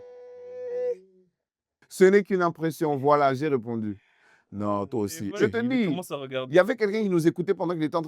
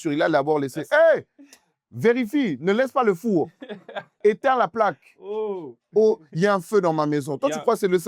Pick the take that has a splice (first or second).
first